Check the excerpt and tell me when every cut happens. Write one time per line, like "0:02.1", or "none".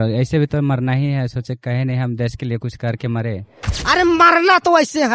0:03.8